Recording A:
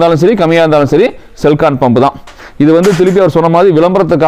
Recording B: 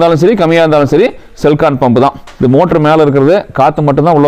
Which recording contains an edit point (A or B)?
B